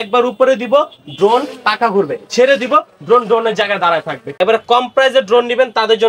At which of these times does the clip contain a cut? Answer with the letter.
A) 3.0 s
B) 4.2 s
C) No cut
B